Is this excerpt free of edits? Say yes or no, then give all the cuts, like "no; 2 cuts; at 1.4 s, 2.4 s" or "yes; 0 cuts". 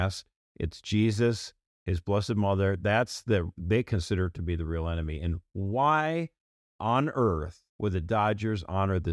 no; 1 cut; at 7.6 s